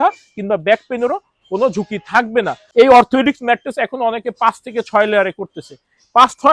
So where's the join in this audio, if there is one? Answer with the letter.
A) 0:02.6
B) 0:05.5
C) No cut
A